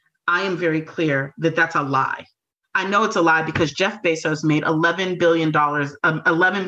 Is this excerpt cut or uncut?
uncut